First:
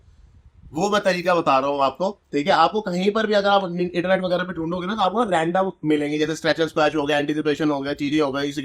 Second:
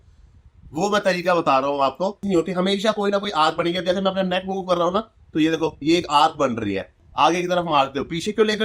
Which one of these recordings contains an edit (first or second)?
second